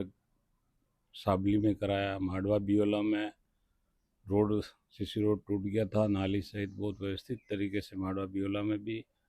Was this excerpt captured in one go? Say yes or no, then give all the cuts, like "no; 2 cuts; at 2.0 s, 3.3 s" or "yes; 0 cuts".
yes; 0 cuts